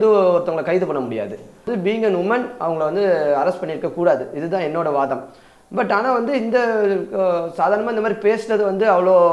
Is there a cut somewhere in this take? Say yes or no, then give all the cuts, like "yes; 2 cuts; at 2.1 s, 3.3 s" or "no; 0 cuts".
yes; 1 cut; at 1.7 s